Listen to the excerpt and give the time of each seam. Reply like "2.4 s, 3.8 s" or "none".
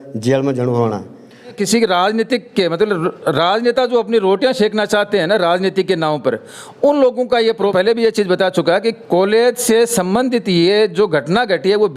1.6 s, 7.6 s